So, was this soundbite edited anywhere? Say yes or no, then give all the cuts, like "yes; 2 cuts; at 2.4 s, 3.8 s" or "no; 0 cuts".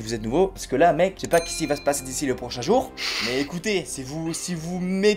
no; 0 cuts